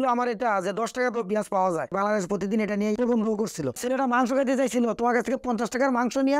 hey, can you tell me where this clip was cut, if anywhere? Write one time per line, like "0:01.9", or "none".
0:01.9
0:03.8